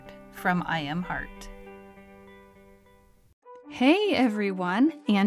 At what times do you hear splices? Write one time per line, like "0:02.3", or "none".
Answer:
0:03.4